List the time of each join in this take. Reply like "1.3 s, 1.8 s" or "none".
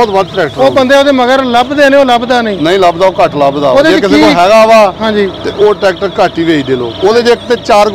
6.9 s